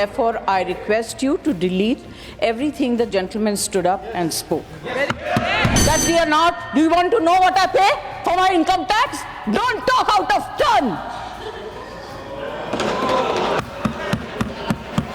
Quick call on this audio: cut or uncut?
cut